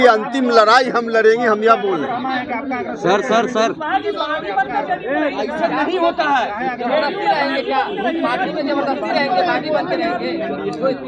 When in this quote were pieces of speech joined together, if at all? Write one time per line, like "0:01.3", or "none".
none